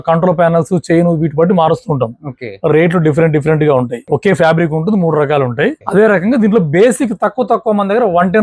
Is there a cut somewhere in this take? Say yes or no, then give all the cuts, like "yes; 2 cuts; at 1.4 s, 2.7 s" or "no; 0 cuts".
yes; 2 cuts; at 4.0 s, 5.8 s